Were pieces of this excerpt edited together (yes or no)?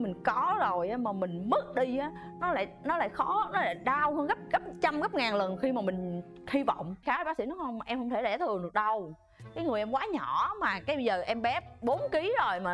yes